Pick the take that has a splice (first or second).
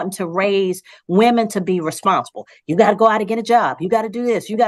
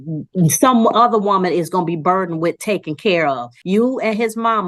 second